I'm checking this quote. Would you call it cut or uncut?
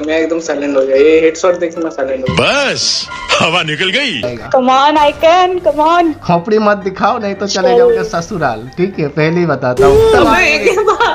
cut